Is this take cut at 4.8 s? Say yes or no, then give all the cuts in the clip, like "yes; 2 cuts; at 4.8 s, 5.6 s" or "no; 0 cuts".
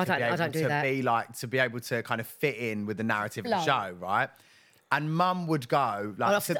no; 0 cuts